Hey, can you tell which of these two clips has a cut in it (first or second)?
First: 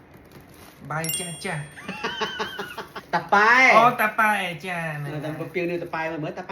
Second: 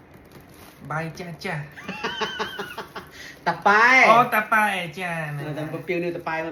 first